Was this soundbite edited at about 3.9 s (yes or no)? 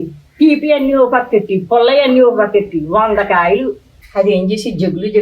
yes